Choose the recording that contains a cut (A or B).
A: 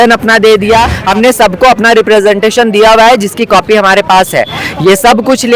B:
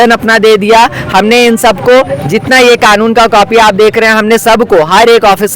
A